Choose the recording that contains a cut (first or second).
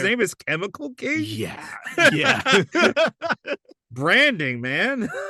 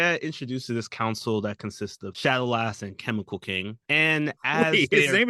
second